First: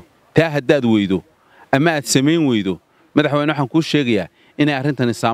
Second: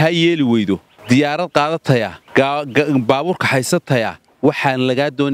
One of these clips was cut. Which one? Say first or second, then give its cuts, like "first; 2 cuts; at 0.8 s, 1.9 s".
second; 3 cuts; at 0.9 s, 2.2 s, 4.2 s